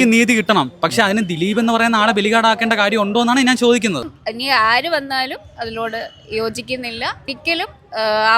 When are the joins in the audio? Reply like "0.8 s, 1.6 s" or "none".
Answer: 4.2 s, 7.4 s

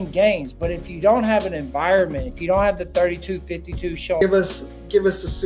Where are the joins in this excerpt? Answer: 4.2 s

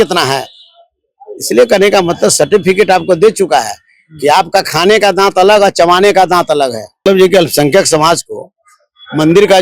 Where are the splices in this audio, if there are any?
7.0 s

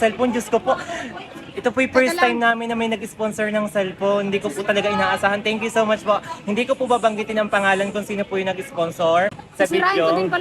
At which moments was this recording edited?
9.4 s

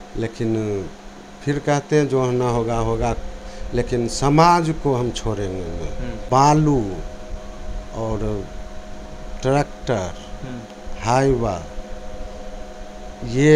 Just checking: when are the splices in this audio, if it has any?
6.2 s

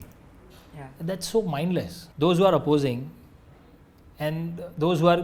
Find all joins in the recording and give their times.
none

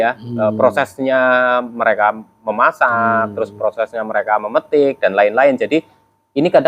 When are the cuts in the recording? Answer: none

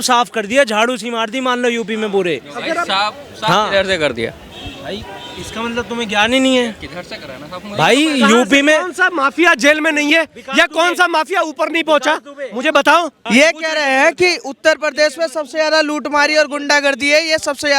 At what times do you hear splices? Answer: 13.2 s

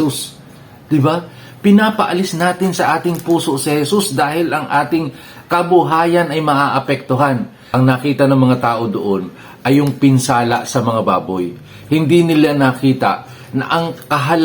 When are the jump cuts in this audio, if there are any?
7.6 s

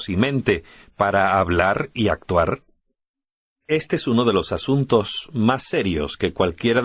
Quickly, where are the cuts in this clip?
1.5 s

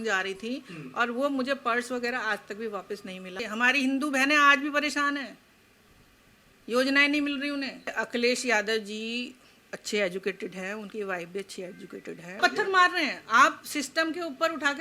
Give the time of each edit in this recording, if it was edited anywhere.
3.4 s, 7.9 s, 12.4 s

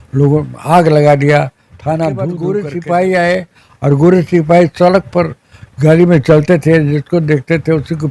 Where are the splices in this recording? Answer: 2.4 s

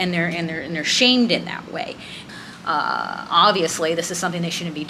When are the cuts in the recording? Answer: 2.2 s

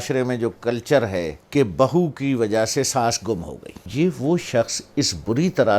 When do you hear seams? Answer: 1.4 s, 3.9 s

